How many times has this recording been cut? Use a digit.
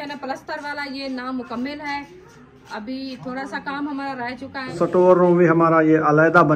1